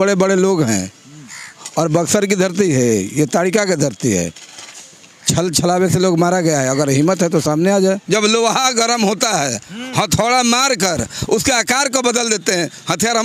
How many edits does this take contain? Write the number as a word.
one